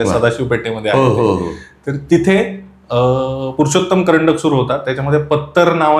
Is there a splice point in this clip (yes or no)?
no